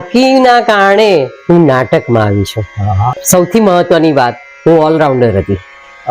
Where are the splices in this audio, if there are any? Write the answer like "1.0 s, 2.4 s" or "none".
3.2 s